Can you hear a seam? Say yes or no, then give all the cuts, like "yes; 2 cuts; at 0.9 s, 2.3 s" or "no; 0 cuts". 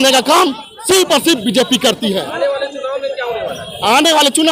no; 0 cuts